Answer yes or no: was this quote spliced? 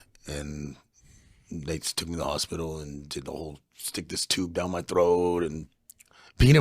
yes